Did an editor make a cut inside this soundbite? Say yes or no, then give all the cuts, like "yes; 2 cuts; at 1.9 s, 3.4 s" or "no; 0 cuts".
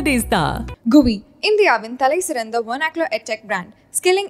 no; 0 cuts